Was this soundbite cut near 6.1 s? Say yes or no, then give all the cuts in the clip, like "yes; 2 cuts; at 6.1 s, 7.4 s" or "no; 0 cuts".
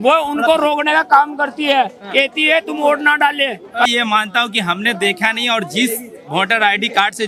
no; 1 cut; at 3.9 s